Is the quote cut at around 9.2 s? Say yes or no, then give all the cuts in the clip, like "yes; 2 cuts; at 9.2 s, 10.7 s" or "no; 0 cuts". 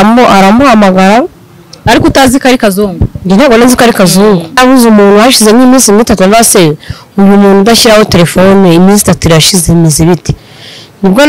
no; 1 cut; at 4.6 s